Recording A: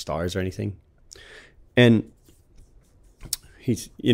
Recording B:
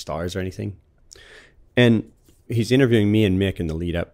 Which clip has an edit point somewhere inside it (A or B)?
B